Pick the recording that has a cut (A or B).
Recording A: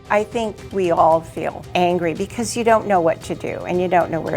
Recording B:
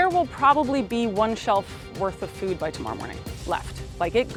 A